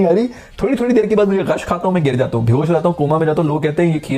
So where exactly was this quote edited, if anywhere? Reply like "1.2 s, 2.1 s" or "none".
none